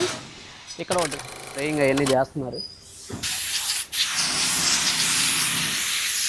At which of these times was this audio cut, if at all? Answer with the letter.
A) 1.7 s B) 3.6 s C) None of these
A